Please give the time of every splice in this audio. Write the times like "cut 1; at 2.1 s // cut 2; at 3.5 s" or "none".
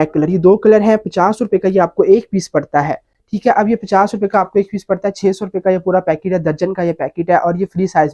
none

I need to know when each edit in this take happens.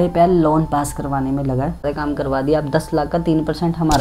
cut 1; at 1.8 s

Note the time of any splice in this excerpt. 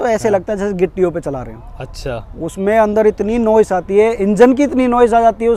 none

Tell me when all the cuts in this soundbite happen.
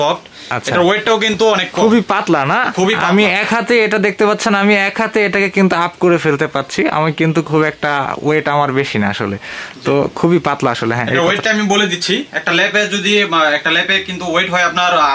none

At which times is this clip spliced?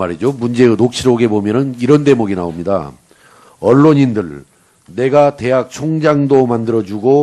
cut 1; at 2.9 s

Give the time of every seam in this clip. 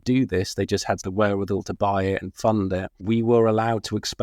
cut 1; at 1.0 s // cut 2; at 2.9 s

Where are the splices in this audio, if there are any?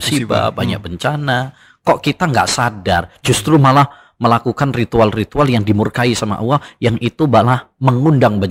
none

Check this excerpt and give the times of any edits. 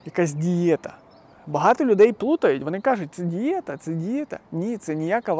none

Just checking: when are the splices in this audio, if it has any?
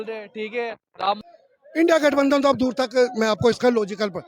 cut 1; at 1.3 s

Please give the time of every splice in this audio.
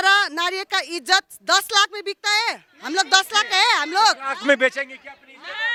none

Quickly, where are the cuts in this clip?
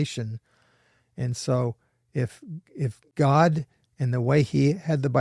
cut 1; at 3.0 s

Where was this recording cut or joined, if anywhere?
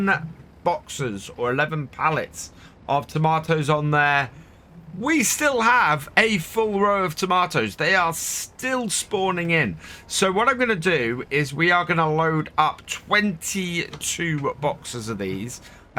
none

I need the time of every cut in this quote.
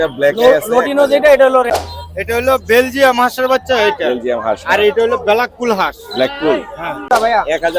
cut 1; at 1.7 s // cut 2; at 7.1 s

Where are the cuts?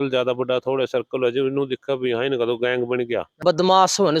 cut 1; at 3.3 s

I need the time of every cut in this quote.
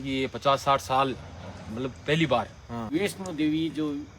cut 1; at 2.9 s

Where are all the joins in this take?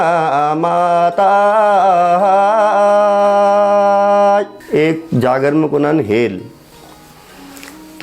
cut 1; at 4.6 s

